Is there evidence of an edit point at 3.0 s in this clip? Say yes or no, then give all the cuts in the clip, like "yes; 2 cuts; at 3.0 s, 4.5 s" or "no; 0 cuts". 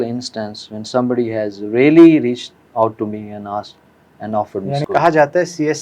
no; 1 cut; at 4.8 s